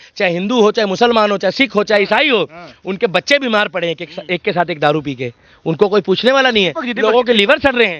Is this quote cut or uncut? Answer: uncut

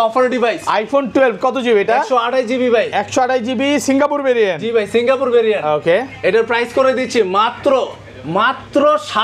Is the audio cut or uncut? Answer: uncut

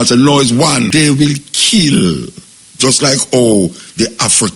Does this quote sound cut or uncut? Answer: cut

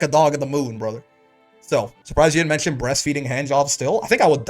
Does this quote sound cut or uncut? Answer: cut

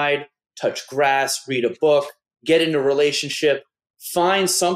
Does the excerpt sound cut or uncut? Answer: uncut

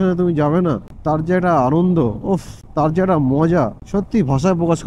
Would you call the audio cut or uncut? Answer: cut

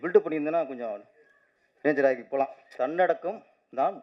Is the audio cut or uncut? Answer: cut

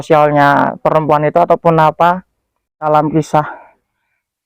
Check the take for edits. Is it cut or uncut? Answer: cut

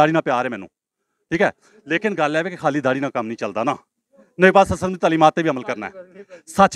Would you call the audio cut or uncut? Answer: uncut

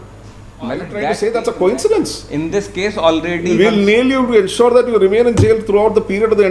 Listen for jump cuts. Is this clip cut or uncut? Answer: cut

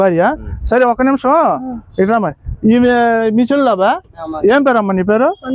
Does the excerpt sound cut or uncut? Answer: cut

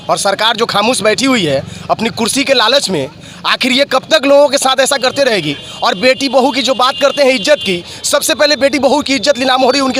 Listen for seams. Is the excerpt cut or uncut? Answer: uncut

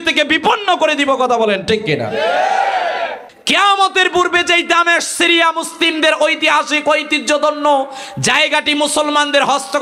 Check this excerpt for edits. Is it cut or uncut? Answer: cut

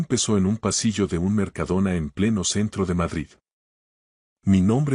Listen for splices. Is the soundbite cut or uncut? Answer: cut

